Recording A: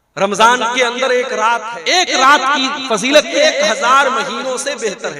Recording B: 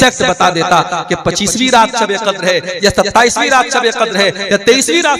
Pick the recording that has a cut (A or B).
A